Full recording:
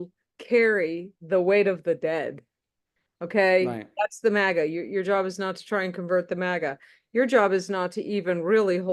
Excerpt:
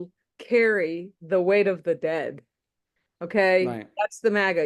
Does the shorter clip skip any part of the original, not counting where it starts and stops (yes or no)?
no